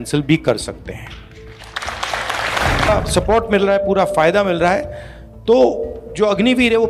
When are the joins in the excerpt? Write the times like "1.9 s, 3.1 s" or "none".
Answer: 2.9 s